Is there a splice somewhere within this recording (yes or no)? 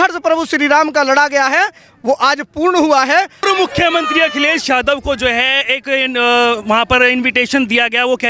yes